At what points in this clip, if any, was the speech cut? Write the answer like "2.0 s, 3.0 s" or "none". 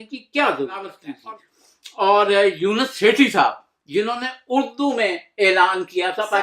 1.1 s